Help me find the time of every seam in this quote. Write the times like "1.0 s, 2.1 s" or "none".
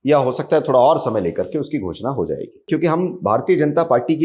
2.6 s